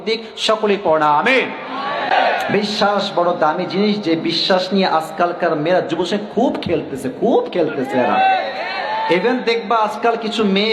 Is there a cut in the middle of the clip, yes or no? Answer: yes